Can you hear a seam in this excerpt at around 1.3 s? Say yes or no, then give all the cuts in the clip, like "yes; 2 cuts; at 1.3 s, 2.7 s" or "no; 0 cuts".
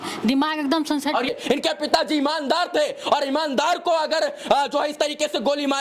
yes; 1 cut; at 1.3 s